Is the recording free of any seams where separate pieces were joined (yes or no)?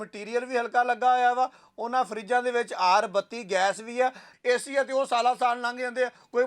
no